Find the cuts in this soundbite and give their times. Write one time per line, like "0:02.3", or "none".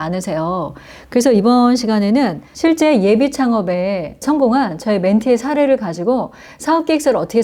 0:02.4
0:04.1